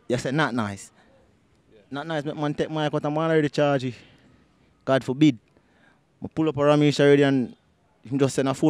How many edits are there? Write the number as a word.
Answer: zero